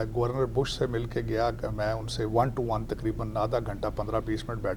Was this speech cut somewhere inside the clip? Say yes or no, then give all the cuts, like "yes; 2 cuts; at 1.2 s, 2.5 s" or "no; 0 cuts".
no; 0 cuts